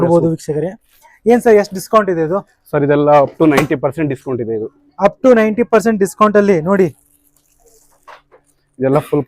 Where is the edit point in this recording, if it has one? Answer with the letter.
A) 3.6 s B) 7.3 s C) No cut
C